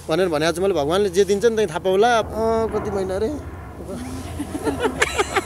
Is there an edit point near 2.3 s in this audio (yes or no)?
yes